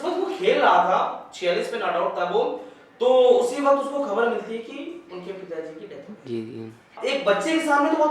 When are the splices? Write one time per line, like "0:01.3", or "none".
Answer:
0:07.0